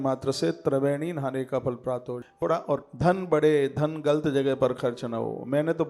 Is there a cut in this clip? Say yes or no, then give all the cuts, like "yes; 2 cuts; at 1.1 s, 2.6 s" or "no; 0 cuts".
yes; 1 cut; at 2.4 s